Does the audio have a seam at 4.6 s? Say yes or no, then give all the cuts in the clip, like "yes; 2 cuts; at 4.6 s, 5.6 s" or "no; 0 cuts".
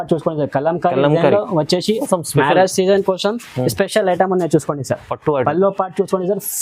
no; 1 cut; at 2.0 s